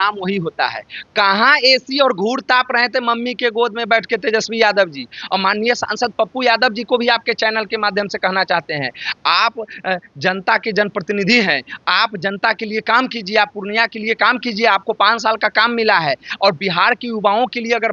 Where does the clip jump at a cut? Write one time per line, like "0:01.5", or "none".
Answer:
none